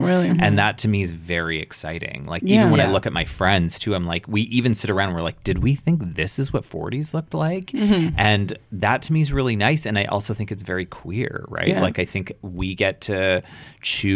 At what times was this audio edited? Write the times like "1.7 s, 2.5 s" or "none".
none